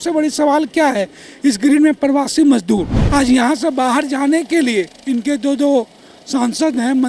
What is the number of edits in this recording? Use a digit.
1